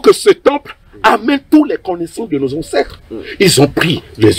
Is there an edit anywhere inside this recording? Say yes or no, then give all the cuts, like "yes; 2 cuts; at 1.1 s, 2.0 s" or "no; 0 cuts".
no; 0 cuts